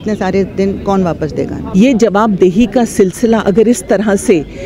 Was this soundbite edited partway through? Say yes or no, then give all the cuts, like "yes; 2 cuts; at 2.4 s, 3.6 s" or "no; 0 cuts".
yes; 1 cut; at 1.6 s